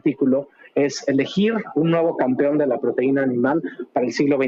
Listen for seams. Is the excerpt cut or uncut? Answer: uncut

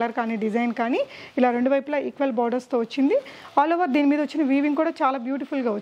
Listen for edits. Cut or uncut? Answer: uncut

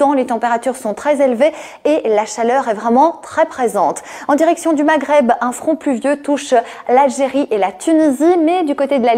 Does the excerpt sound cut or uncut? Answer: uncut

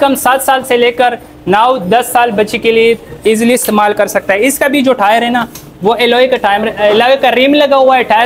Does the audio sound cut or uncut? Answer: uncut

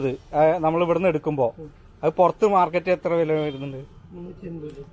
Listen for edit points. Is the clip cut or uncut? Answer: uncut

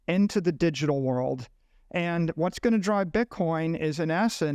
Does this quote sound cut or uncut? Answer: uncut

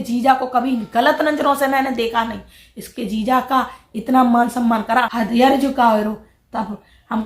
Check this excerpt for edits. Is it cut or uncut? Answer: cut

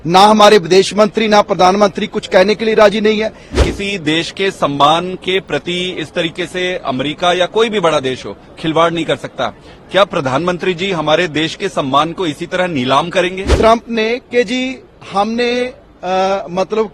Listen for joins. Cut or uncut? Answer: cut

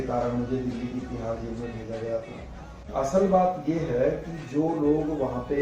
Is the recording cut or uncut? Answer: cut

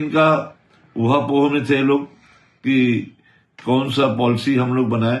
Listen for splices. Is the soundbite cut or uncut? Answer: uncut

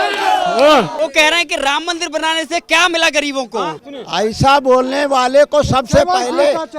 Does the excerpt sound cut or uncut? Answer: cut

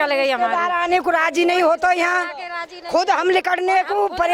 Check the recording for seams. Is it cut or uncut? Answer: uncut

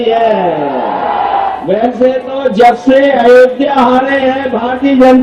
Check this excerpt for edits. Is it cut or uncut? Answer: cut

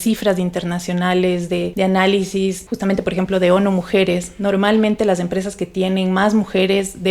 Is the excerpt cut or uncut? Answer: cut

